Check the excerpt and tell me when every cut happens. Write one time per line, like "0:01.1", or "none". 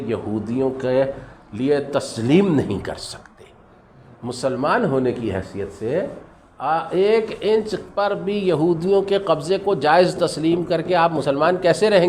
none